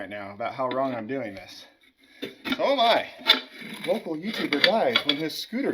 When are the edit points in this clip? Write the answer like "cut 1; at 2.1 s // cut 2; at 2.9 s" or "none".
cut 1; at 3.6 s